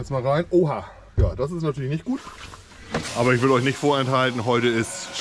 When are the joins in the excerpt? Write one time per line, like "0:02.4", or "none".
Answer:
0:03.1